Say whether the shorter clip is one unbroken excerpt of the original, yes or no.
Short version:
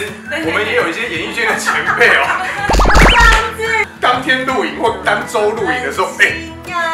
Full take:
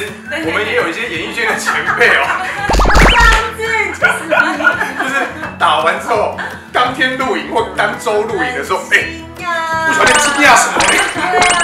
no